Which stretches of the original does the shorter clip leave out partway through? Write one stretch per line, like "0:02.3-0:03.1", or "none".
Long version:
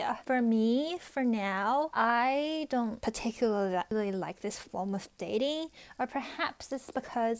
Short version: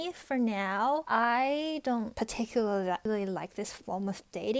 none